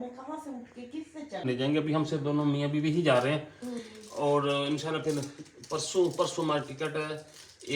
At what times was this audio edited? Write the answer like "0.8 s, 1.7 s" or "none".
1.4 s